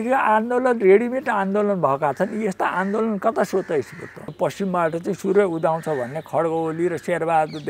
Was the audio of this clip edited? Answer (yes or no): yes